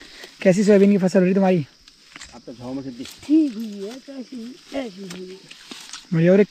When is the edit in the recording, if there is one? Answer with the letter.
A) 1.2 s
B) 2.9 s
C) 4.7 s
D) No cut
D